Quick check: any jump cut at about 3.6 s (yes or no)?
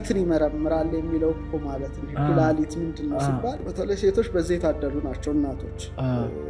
yes